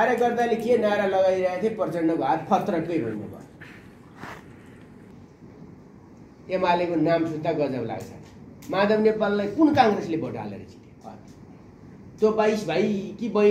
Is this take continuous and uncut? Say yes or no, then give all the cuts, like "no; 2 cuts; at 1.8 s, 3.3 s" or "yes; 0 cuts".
no; 1 cut; at 4.9 s